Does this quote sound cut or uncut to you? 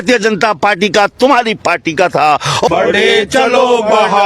cut